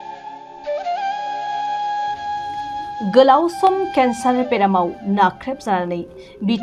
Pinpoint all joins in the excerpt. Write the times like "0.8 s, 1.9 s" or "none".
3.0 s

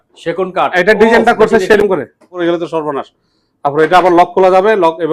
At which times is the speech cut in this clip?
2.4 s

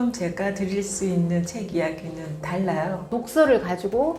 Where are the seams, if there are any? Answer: 3.0 s

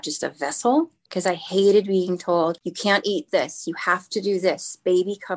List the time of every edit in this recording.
1.1 s, 2.7 s

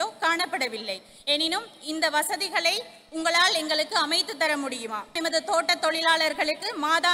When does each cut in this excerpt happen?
5.1 s

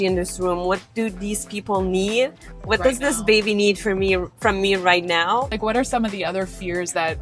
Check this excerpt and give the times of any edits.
5.5 s

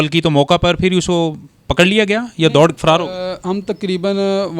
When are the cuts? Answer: none

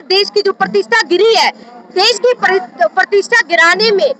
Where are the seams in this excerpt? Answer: none

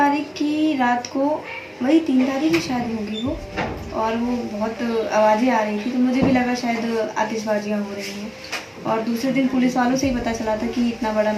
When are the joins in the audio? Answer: none

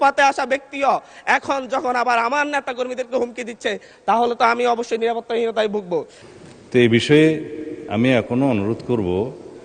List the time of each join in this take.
6.2 s

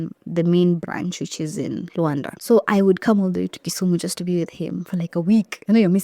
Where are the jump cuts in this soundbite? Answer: 2.3 s, 5.1 s

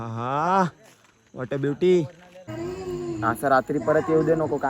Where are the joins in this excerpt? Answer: 2.5 s

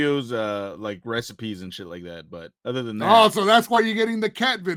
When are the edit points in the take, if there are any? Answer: none

